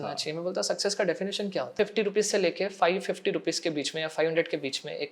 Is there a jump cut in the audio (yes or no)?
yes